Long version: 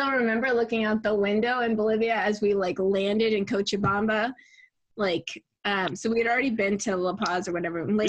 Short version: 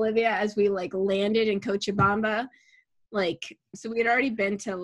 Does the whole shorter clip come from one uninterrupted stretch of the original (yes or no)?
no